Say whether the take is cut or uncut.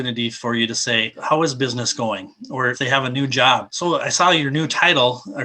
cut